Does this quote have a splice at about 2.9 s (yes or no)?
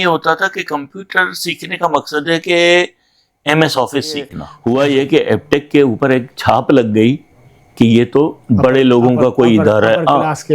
no